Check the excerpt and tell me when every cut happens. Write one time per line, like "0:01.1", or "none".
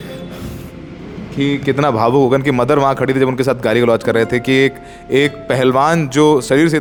none